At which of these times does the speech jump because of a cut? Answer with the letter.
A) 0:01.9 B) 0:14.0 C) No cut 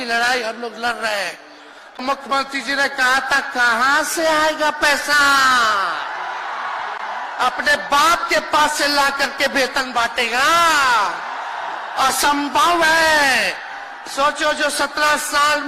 A